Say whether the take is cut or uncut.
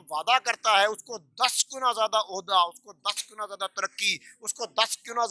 uncut